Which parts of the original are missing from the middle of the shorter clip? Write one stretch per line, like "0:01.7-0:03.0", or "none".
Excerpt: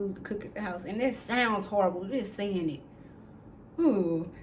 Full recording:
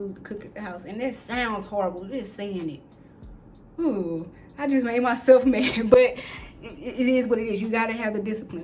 none